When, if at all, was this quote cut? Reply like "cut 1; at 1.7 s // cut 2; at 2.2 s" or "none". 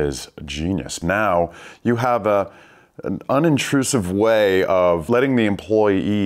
cut 1; at 1.0 s // cut 2; at 5.0 s